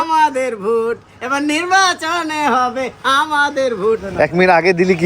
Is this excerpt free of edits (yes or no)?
no